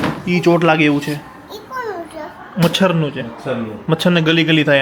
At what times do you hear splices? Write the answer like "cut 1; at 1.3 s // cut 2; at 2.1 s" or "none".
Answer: none